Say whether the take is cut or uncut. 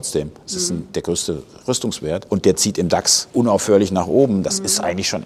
cut